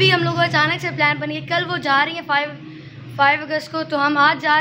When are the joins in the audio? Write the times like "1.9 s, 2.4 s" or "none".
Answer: none